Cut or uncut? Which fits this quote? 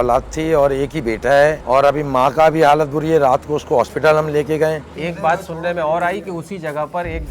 cut